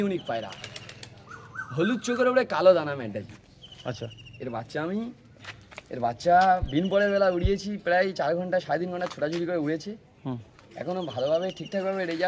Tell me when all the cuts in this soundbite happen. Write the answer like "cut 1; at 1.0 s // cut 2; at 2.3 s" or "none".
none